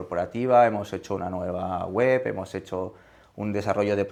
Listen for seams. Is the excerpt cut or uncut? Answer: uncut